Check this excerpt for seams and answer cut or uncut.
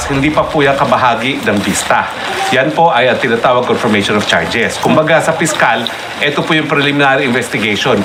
uncut